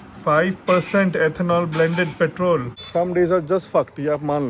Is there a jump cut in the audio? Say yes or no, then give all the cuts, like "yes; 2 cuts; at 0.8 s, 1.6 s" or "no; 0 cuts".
yes; 1 cut; at 2.8 s